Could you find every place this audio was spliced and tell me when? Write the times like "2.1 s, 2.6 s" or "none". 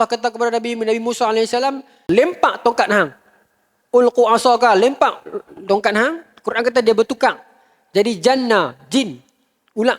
2.0 s